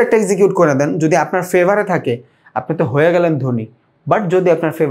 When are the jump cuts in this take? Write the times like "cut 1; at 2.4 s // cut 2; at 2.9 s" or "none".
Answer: none

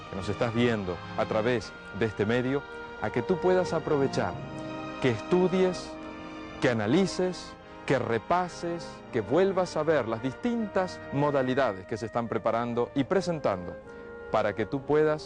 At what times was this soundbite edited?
cut 1; at 5.7 s

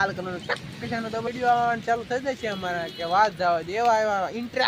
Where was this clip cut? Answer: cut 1; at 1.3 s

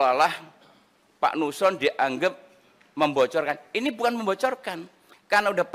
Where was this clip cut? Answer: none

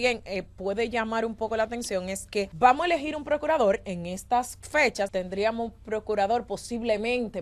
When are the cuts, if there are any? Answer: cut 1; at 2.5 s // cut 2; at 5.1 s

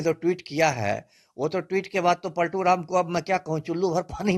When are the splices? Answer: none

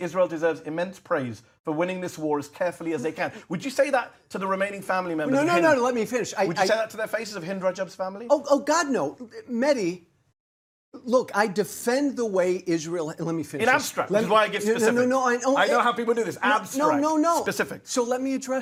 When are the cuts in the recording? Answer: none

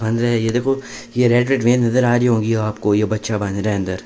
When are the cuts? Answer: none

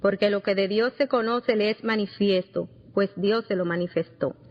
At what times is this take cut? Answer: cut 1; at 3.4 s

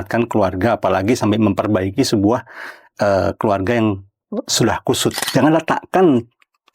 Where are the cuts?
cut 1; at 5.2 s

